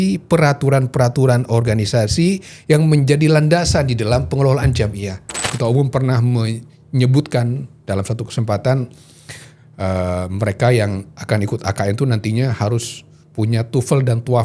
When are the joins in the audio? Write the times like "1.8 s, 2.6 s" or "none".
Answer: 5.5 s